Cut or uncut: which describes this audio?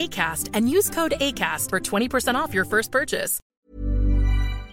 cut